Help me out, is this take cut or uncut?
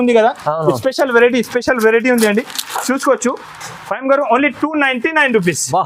uncut